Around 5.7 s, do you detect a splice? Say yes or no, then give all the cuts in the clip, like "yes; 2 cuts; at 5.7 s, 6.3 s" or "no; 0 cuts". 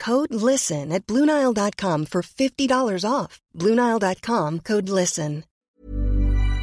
yes; 1 cut; at 5.7 s